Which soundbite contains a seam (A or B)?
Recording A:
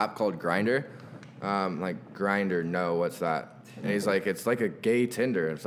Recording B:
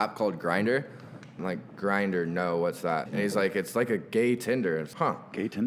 B